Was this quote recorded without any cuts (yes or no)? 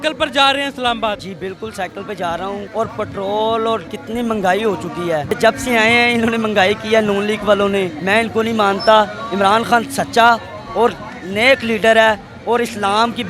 yes